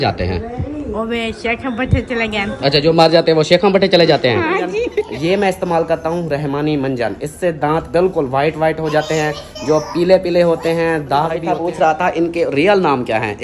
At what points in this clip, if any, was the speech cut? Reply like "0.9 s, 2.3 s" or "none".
4.8 s, 11.4 s